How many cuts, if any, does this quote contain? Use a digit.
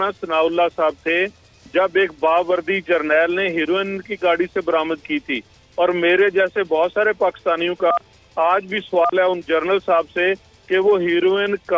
0